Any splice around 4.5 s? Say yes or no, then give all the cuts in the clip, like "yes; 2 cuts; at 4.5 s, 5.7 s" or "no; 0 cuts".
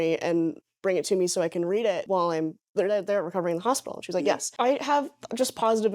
yes; 2 cuts; at 2.0 s, 4.5 s